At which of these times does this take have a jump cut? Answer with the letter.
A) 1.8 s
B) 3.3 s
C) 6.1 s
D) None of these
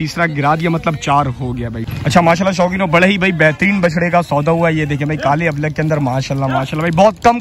A